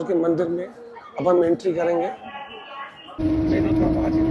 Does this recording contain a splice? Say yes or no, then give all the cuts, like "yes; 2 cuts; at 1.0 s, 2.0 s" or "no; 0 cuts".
yes; 1 cut; at 3.2 s